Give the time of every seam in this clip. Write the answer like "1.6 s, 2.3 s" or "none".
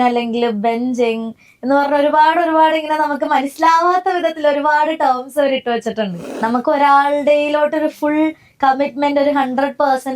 6.2 s